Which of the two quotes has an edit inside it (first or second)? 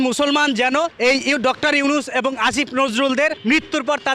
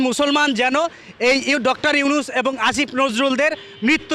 first